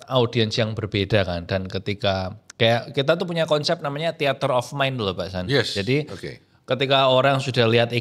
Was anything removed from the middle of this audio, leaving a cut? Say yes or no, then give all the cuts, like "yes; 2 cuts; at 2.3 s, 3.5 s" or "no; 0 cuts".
no; 0 cuts